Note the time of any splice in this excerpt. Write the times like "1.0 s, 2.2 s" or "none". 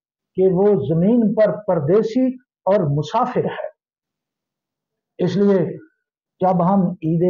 none